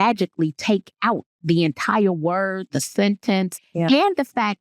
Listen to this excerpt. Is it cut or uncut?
cut